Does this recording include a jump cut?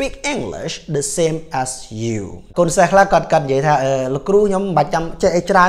yes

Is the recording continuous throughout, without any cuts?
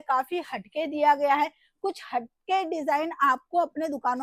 yes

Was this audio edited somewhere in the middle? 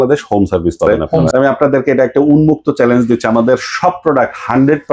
yes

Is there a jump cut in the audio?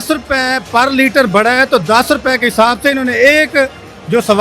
no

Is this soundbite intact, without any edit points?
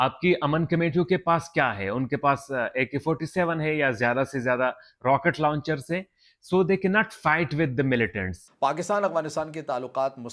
no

